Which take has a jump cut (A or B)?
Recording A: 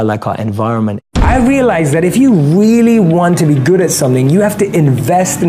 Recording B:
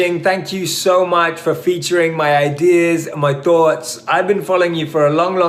A